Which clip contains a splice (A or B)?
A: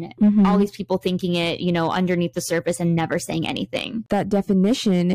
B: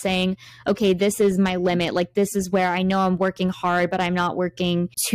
A